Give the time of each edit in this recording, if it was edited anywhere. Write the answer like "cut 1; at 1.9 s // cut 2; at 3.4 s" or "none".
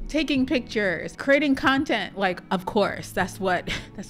cut 1; at 1.1 s